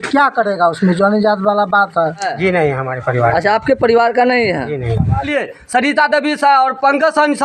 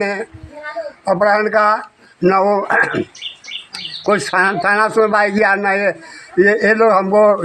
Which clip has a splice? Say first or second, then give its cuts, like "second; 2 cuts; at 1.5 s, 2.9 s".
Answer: first; 2 cuts; at 2.3 s, 5.3 s